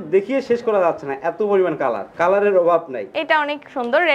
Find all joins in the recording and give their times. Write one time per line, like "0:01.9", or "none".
none